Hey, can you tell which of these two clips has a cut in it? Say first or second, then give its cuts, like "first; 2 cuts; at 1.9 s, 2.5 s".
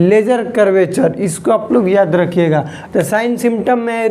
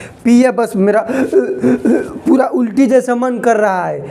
first; 1 cut; at 2.8 s